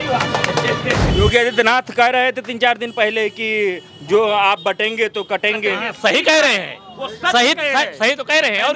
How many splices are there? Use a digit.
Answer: 1